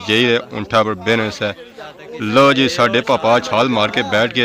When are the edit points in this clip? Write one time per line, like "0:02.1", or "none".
none